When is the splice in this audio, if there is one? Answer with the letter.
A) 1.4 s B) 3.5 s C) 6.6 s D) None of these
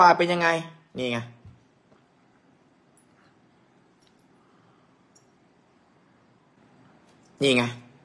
C